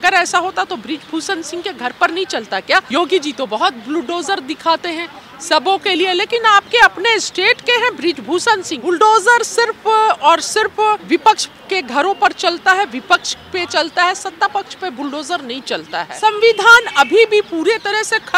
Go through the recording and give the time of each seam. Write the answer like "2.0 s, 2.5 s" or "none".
2.9 s, 8.7 s, 11.0 s, 16.0 s